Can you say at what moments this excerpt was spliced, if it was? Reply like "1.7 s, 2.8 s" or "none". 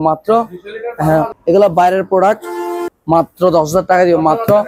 1.3 s, 2.9 s